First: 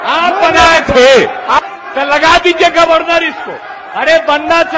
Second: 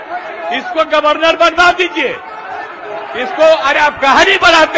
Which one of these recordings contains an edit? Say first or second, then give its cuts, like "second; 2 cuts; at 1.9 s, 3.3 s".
first; 1 cut; at 1.6 s